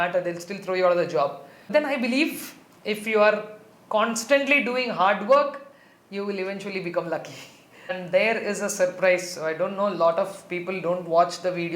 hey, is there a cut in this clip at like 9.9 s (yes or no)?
no